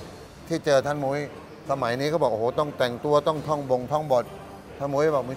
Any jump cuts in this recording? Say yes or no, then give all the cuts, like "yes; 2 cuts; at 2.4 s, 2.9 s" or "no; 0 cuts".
no; 0 cuts